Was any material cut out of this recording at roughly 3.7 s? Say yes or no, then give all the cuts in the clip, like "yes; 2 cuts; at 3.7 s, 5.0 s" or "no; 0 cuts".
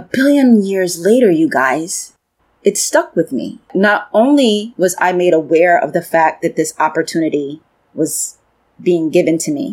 yes; 1 cut; at 3.7 s